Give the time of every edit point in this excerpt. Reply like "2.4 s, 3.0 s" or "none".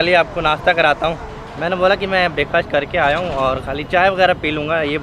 none